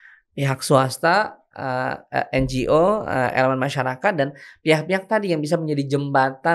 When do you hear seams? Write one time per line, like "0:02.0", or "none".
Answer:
none